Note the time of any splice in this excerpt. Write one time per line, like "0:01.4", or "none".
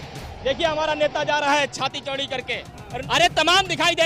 0:03.0